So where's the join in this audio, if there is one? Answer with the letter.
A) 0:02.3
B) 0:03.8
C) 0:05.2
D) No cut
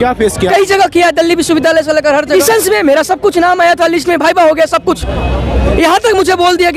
A